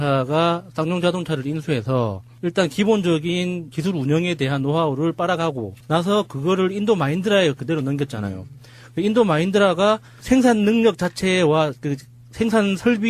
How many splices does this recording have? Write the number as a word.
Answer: zero